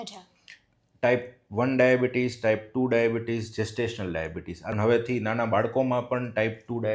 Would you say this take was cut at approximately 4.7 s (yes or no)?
yes